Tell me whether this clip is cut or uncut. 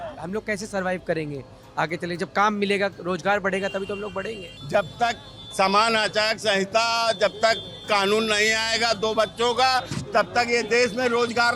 cut